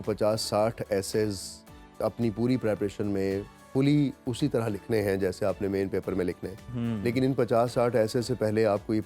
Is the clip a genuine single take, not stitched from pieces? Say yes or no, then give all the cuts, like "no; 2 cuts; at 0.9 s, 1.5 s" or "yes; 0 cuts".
yes; 0 cuts